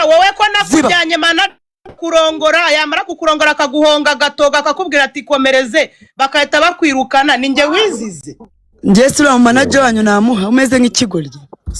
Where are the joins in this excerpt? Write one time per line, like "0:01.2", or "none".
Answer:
none